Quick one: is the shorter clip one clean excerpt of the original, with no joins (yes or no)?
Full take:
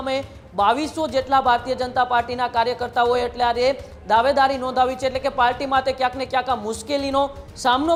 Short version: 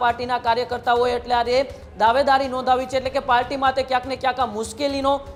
yes